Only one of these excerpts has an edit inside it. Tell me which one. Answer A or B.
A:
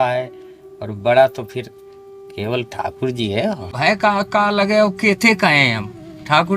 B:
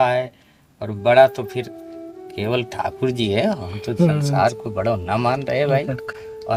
A